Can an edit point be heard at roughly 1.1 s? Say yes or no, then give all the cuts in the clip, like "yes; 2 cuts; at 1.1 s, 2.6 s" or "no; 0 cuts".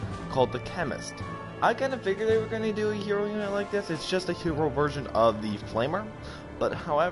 no; 1 cut; at 4.3 s